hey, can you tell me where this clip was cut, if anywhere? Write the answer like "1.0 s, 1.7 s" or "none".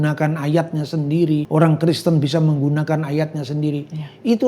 1.5 s